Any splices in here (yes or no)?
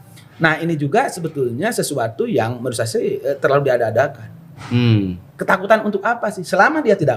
no